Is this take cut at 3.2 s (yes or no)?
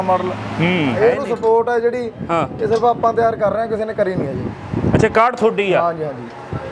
no